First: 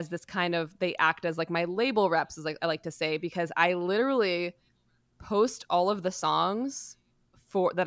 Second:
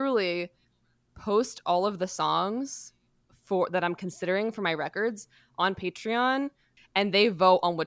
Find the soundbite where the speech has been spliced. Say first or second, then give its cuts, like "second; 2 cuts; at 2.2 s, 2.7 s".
second; 1 cut; at 6.7 s